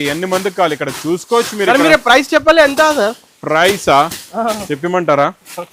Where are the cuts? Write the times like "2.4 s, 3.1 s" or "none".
none